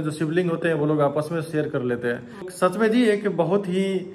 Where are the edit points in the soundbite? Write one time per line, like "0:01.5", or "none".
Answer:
0:02.5